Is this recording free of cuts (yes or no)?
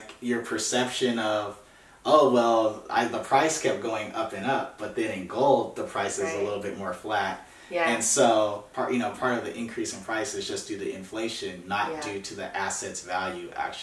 no